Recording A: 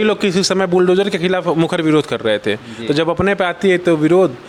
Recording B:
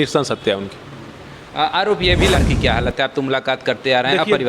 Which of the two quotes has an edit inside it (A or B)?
B